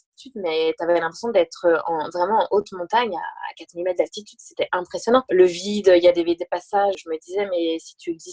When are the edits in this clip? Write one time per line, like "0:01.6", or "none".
0:05.3
0:07.0